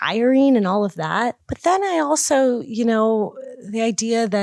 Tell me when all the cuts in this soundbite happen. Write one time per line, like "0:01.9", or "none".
0:01.4